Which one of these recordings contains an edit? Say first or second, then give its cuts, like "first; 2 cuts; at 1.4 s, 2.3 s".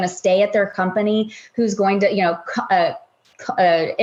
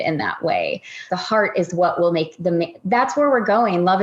second; 1 cut; at 1.1 s